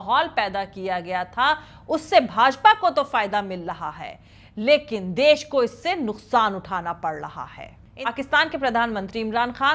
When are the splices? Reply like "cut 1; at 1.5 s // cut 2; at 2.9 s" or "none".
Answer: cut 1; at 7.9 s